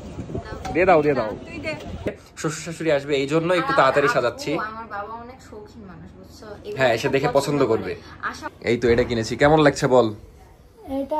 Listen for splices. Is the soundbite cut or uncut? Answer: cut